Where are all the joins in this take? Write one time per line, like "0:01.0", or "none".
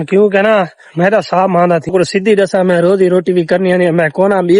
0:01.9